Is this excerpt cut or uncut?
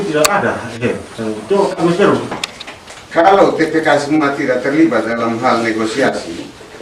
cut